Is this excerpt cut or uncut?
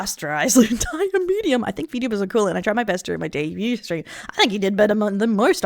uncut